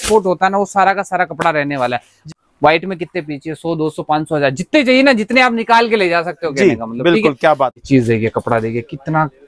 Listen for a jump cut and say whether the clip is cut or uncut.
cut